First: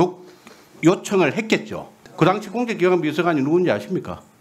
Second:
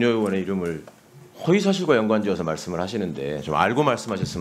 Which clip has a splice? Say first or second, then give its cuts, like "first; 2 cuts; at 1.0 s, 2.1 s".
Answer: first; 1 cut; at 2.0 s